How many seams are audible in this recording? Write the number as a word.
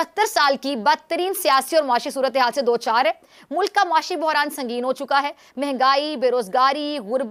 zero